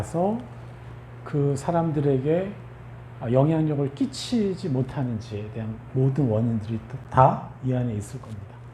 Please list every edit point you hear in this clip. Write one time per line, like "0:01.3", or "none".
0:07.0